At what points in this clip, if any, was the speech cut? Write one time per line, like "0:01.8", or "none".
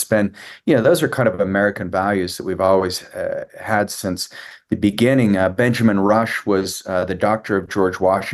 none